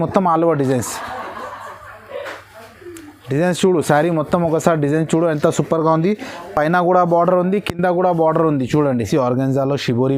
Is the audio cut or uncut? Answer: cut